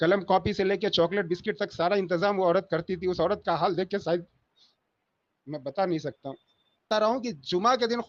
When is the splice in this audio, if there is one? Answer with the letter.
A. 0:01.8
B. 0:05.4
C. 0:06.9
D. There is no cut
C